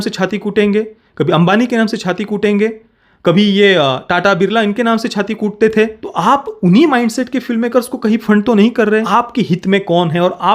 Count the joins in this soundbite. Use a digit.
1